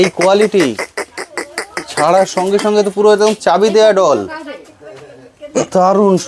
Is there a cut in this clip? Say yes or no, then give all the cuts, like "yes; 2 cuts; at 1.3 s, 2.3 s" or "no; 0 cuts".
no; 0 cuts